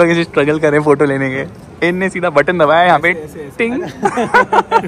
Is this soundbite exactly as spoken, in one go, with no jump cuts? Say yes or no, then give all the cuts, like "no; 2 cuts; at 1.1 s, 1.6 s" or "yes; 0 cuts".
yes; 0 cuts